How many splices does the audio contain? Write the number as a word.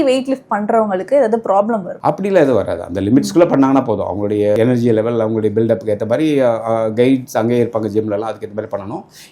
one